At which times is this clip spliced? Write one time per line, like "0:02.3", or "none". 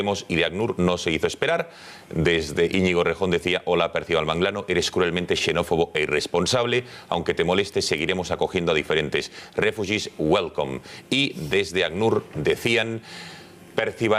none